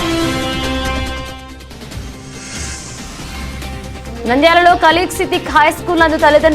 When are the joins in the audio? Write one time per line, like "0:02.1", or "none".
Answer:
none